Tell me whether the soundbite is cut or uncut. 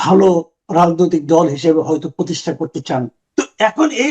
cut